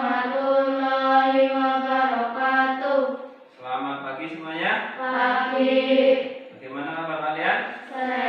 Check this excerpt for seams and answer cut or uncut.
uncut